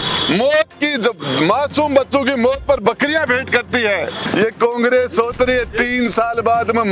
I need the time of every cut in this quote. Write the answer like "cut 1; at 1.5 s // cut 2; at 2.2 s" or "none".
cut 1; at 4.2 s

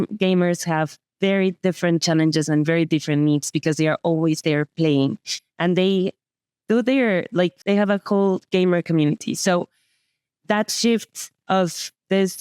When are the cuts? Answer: cut 1; at 7.6 s

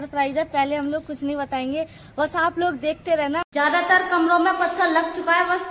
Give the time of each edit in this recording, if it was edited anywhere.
cut 1; at 3.5 s

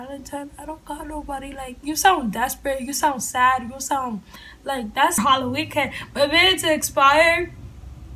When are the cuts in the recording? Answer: cut 1; at 5.2 s

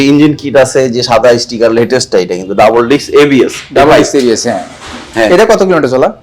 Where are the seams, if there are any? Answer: none

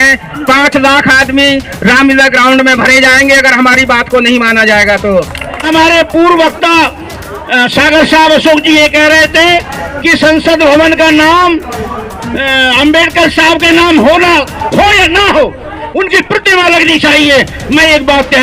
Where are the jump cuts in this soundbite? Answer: cut 1; at 5.7 s

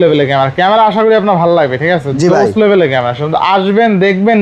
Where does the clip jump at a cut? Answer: none

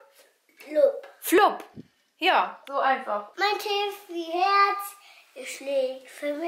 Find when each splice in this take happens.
cut 1; at 3.3 s

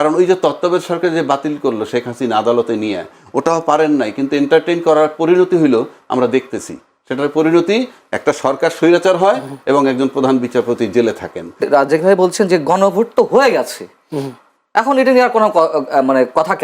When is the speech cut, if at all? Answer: cut 1; at 11.7 s

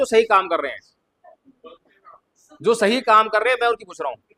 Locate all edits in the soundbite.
none

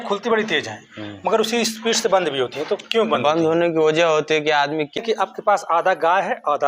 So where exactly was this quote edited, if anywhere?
cut 1; at 5.0 s

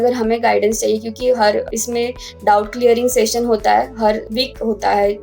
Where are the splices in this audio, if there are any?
cut 1; at 1.7 s // cut 2; at 4.3 s

